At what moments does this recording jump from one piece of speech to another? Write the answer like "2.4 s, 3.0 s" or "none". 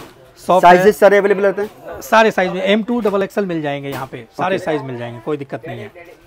none